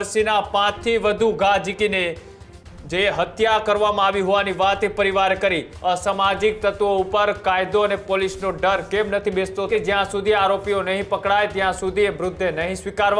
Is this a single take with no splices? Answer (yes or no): no